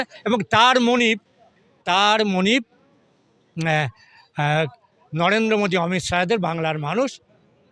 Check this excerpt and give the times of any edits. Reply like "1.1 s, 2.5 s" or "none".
none